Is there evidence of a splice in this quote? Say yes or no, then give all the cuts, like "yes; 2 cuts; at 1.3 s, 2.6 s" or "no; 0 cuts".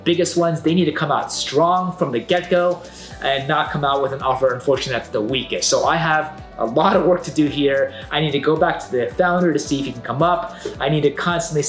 no; 0 cuts